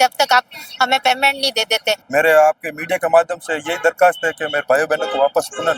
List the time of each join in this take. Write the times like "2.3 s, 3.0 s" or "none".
2.0 s